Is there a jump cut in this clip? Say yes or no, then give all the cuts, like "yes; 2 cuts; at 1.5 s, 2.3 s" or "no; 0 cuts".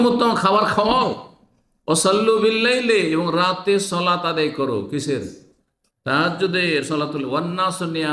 no; 0 cuts